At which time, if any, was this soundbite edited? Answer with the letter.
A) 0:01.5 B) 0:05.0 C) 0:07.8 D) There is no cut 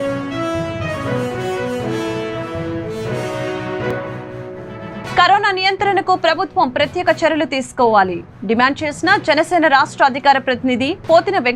D